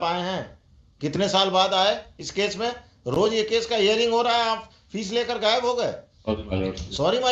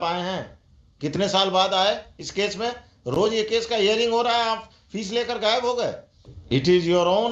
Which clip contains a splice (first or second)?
second